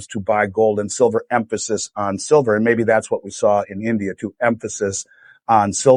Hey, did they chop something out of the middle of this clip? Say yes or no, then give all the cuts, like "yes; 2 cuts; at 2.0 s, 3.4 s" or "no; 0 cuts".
no; 0 cuts